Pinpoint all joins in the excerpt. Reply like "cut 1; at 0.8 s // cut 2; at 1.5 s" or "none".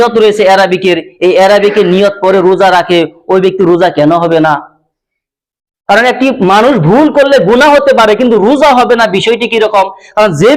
none

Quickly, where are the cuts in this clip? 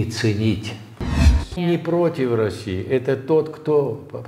cut 1; at 1.4 s

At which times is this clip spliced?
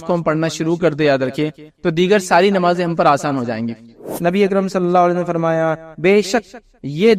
cut 1; at 4.1 s

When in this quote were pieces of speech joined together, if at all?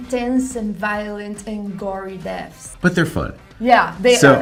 none

